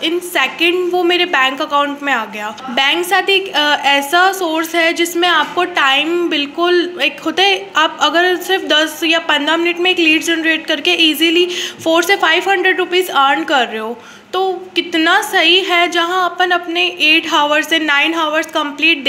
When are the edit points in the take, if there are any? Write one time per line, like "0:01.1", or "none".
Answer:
0:02.6